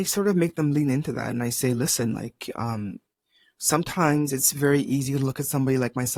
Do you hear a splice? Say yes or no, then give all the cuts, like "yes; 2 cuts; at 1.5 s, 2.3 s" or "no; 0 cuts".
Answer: no; 0 cuts